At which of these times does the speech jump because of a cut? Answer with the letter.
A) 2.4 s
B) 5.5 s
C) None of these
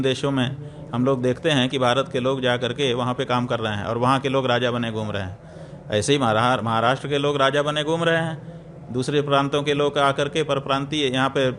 C